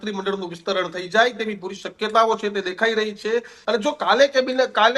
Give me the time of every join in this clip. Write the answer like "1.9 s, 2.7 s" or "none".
3.5 s